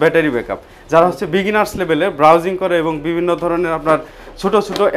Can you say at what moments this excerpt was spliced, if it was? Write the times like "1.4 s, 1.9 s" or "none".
none